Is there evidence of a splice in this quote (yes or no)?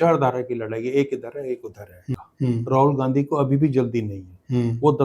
yes